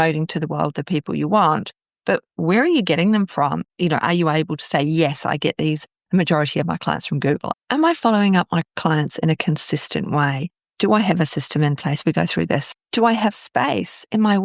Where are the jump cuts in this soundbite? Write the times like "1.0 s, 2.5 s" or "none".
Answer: 7.5 s, 12.7 s

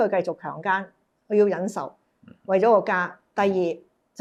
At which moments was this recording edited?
none

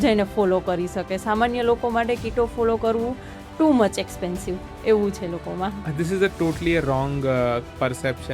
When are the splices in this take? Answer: none

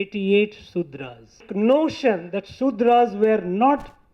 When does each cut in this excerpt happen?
1.5 s

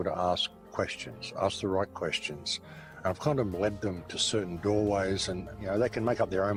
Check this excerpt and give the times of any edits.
none

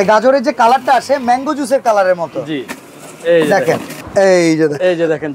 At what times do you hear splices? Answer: 4.0 s

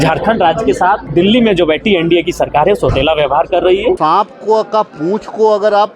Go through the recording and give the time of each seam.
1.0 s, 4.0 s

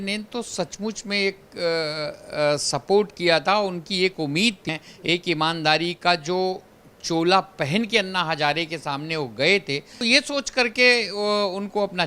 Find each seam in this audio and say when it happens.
4.6 s, 10.0 s

